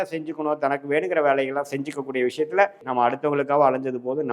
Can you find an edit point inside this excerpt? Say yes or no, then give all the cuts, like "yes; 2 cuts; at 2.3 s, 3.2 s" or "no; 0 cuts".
yes; 1 cut; at 2.8 s